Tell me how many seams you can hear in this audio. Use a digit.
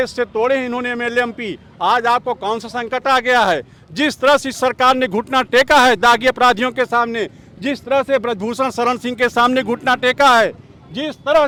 0